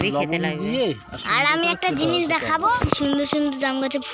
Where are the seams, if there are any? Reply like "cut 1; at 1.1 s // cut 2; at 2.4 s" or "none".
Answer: cut 1; at 2.7 s